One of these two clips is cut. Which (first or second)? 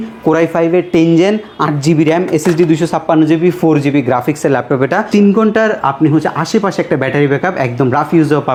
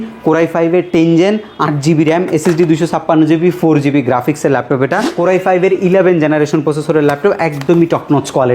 second